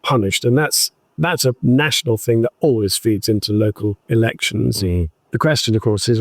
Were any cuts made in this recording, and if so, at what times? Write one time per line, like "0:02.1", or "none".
0:05.3